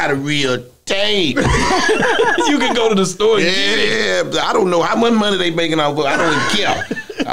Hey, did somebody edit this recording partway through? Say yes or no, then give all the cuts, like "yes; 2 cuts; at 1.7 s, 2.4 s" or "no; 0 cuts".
no; 0 cuts